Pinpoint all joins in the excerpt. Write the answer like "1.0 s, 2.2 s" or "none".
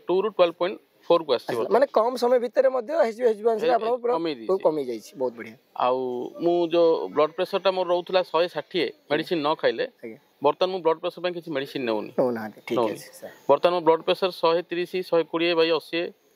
none